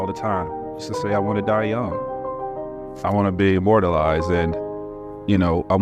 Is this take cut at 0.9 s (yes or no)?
yes